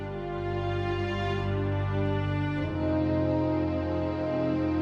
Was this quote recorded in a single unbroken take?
yes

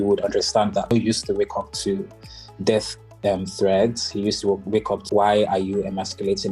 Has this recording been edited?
yes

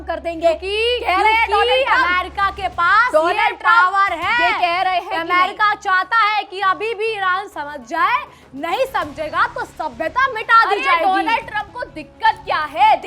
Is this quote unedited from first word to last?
yes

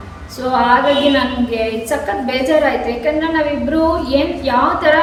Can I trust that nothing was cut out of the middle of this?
yes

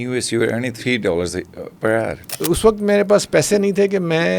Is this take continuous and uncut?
no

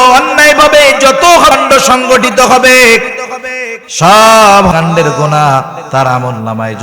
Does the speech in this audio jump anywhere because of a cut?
yes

